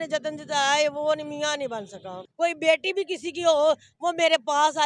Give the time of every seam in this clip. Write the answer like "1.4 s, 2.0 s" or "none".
2.2 s